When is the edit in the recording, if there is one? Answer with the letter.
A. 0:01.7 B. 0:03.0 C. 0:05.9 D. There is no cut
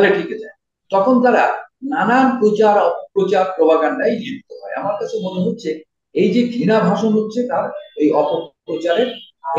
D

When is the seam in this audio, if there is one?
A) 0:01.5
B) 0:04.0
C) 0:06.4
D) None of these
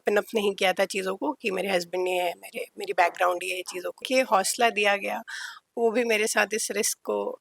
B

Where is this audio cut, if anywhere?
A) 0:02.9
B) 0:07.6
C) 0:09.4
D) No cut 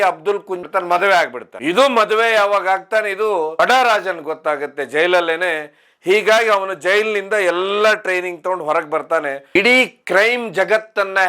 C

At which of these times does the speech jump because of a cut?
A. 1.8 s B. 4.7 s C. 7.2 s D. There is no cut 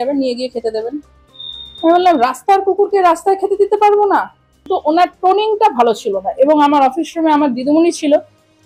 B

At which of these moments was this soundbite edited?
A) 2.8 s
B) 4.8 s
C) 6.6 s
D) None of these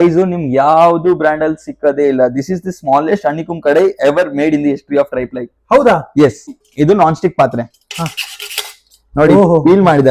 C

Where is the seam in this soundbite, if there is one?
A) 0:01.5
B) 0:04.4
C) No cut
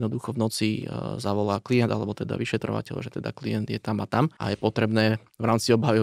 B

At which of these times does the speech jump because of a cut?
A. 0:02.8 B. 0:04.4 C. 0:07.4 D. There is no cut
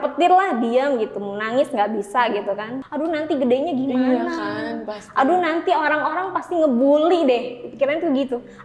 A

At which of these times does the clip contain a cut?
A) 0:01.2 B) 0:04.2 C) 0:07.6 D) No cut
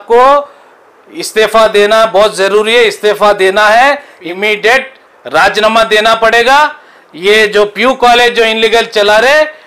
B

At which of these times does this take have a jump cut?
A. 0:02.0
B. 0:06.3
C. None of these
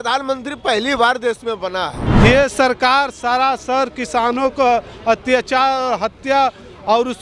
A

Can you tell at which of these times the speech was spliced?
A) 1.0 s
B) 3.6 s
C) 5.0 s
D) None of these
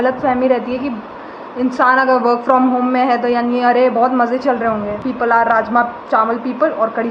C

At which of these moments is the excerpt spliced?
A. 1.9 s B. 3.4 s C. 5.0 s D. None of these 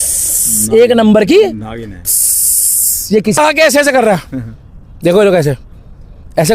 B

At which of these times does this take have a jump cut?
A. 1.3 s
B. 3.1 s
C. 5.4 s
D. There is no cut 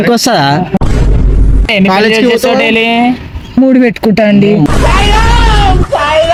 D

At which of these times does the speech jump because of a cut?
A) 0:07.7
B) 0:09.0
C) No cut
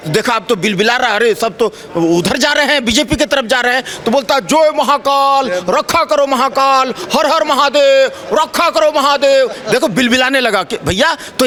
C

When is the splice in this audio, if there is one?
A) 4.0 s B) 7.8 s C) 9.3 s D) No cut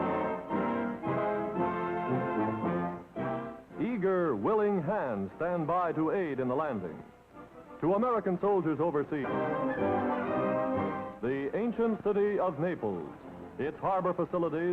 D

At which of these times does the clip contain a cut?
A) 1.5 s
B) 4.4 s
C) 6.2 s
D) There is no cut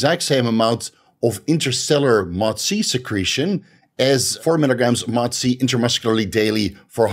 B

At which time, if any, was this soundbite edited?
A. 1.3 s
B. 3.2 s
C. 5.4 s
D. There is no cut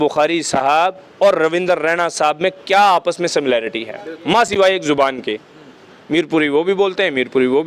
D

